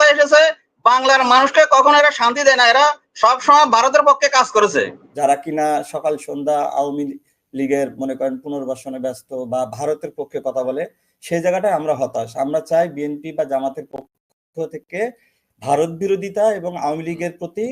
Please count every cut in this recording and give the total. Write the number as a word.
one